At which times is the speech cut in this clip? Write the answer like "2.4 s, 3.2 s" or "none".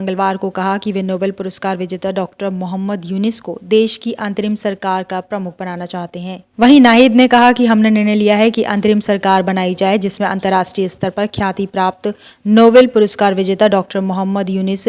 6.4 s